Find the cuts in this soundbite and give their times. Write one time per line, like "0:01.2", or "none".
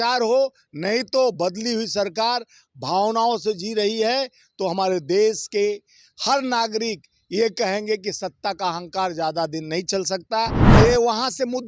0:10.6